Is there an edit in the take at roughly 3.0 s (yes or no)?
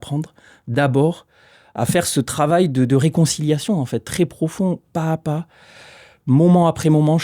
no